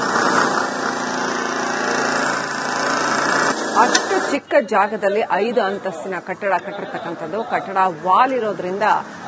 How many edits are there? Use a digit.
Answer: 1